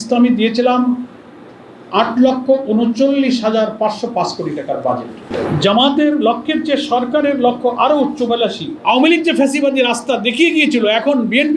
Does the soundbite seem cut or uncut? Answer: cut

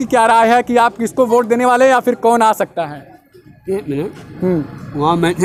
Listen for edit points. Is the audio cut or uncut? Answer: uncut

